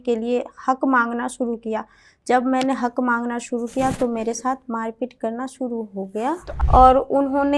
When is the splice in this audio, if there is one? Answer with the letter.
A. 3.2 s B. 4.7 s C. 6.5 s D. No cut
C